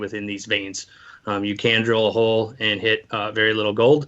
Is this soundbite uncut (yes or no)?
no